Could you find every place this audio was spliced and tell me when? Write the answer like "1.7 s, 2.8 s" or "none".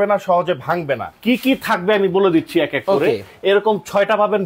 1.1 s